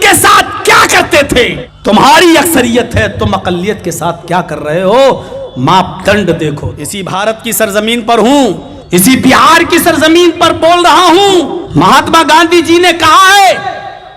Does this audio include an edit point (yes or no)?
yes